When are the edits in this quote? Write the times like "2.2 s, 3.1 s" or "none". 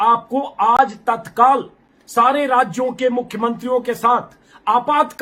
none